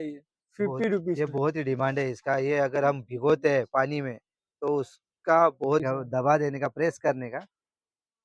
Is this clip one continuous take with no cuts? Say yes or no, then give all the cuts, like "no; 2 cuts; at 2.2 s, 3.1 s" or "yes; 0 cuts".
no; 1 cut; at 5.8 s